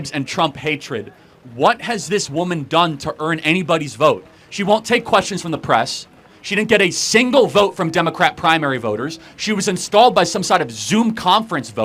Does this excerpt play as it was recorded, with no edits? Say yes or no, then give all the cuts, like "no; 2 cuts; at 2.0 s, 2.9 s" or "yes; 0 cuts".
yes; 0 cuts